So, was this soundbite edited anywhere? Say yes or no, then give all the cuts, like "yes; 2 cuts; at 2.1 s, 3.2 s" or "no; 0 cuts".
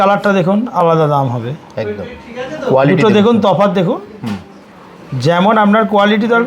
no; 0 cuts